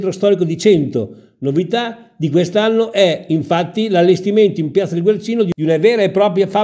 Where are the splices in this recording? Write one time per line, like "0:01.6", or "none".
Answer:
0:05.5